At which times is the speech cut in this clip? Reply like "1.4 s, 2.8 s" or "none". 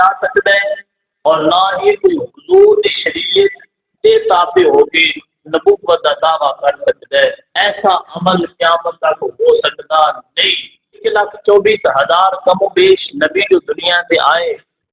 7.5 s, 11.0 s